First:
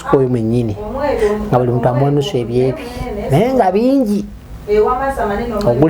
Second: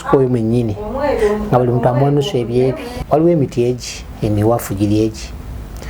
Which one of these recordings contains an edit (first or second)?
second